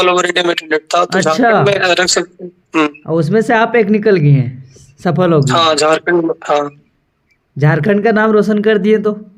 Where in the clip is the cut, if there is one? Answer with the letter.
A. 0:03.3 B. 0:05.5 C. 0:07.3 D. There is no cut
D